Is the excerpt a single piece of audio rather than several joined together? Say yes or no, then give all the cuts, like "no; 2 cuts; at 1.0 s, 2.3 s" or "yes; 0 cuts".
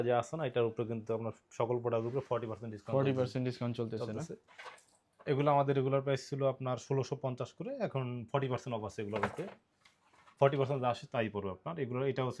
yes; 0 cuts